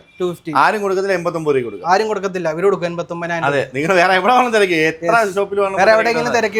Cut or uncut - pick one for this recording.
uncut